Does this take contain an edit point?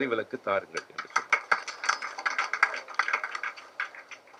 no; 0 cuts

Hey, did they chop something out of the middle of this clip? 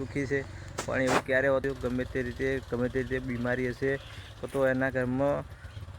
yes; 1 cut; at 1.7 s

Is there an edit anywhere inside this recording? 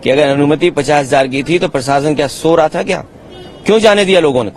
no; 0 cuts

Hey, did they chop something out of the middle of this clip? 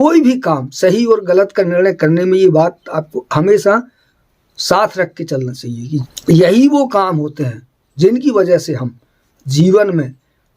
yes; 1 cut; at 6.1 s

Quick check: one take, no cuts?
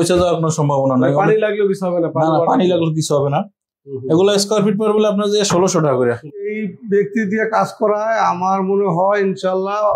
no; 1 cut; at 6.7 s

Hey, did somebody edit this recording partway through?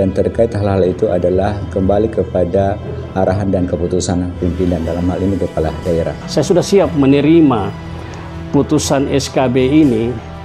yes; 1 cut; at 6.2 s

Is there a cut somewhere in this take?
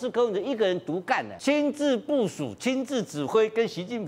yes; 1 cut; at 1.3 s

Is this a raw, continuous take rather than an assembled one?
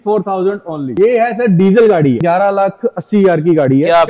no; 2 cuts; at 0.9 s, 2.2 s

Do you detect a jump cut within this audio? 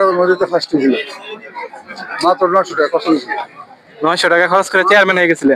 no; 0 cuts

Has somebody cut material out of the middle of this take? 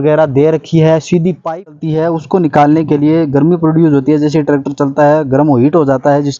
yes; 1 cut; at 1.7 s

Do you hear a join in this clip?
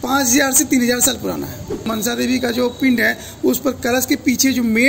yes; 1 cut; at 1.9 s

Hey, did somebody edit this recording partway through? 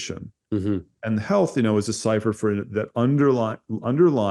no; 0 cuts

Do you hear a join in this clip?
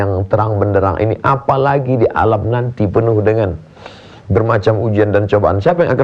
no; 0 cuts

